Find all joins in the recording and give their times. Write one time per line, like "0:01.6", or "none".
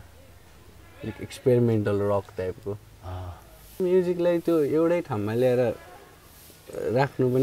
0:03.8